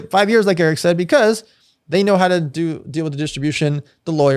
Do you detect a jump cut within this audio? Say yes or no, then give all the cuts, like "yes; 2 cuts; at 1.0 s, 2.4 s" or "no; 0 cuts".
no; 0 cuts